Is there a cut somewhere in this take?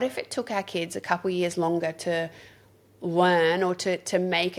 no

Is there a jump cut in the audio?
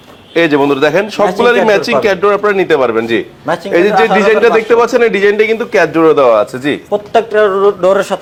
no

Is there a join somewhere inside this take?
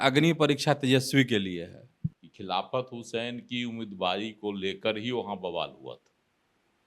yes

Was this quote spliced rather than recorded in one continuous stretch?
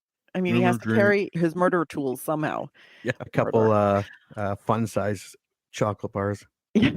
yes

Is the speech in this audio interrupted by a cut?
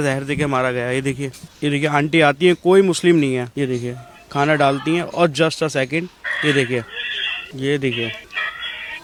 no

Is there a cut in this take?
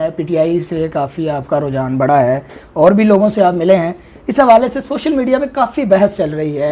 no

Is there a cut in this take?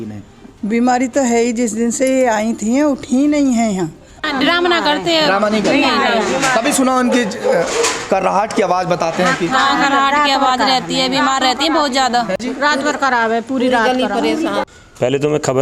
yes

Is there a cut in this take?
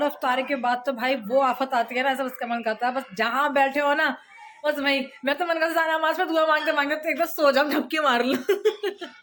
no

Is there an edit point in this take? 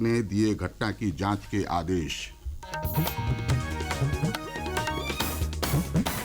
yes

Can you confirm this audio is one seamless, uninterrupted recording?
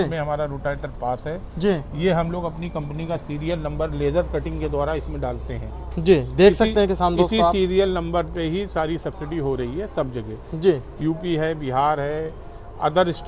yes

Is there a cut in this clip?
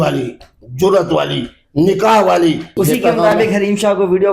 yes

